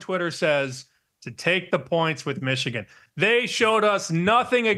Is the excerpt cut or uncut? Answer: cut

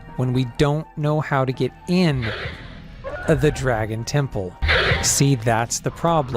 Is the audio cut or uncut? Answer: cut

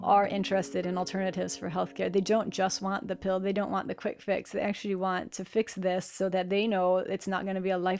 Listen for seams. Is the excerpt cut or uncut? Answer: uncut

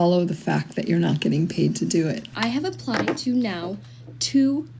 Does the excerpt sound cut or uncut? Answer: cut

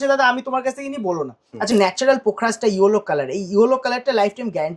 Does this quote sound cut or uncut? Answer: cut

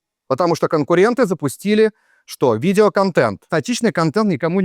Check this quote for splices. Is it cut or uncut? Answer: cut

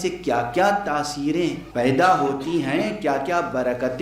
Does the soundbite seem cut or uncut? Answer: cut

